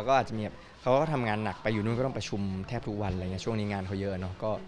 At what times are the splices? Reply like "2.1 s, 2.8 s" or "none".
none